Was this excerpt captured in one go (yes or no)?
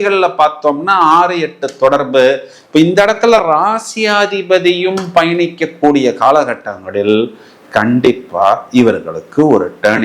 yes